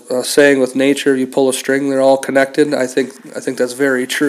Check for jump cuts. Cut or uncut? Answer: uncut